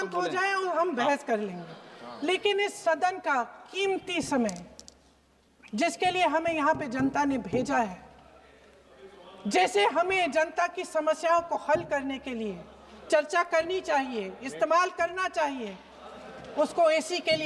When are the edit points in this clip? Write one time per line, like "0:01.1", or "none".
none